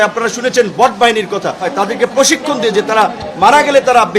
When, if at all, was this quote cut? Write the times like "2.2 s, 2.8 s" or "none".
1.7 s